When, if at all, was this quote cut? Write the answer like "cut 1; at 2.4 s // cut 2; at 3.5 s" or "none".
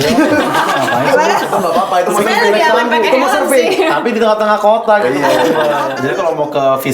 cut 1; at 5.9 s